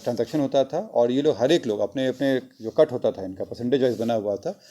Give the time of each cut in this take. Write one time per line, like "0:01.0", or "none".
0:02.3